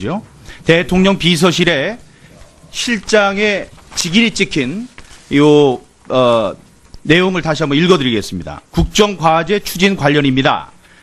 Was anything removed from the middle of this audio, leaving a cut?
no; 0 cuts

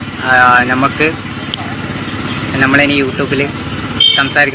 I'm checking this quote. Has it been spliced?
no; 0 cuts

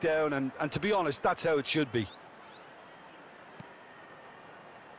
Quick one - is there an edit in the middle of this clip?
no; 0 cuts

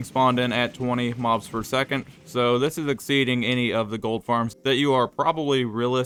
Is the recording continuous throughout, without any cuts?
yes; 0 cuts

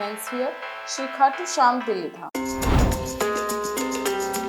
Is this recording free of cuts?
no; 1 cut; at 2.2 s

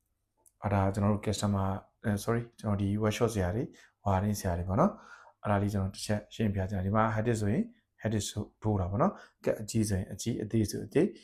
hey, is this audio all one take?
yes; 0 cuts

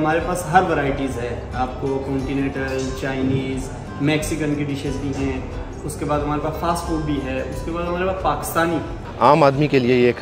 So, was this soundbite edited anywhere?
yes; 1 cut; at 9.0 s

